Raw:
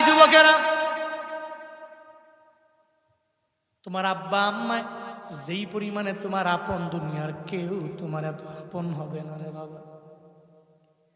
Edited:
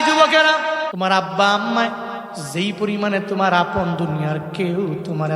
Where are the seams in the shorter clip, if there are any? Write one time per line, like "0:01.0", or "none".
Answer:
0:00.9